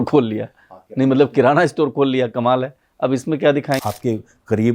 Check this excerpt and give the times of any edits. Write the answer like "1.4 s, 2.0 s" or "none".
3.8 s